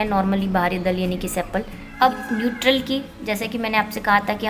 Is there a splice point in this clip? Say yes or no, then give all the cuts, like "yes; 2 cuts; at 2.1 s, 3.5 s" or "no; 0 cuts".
yes; 1 cut; at 1.8 s